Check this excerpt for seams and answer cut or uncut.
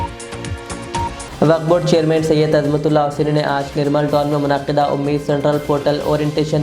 cut